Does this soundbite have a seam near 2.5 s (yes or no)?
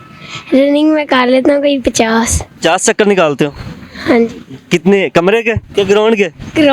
yes